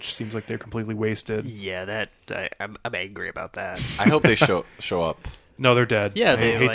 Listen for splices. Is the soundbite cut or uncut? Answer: uncut